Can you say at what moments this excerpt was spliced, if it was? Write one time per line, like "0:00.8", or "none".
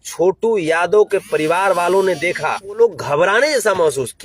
0:02.8